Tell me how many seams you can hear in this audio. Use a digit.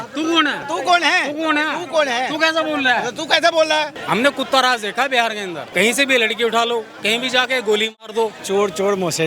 3